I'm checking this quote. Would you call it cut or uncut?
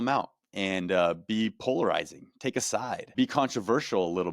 cut